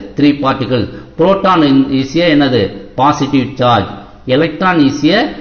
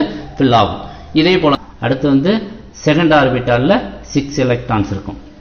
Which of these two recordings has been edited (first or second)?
second